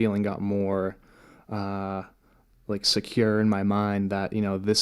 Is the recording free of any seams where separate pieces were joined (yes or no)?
yes